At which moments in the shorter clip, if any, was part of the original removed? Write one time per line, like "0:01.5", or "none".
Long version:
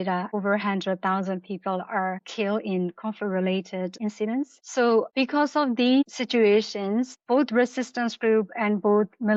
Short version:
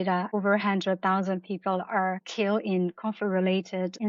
none